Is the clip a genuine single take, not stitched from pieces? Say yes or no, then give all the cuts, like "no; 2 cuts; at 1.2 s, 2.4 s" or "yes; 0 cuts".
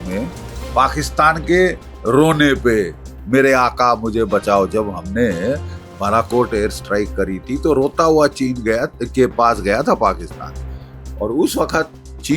yes; 0 cuts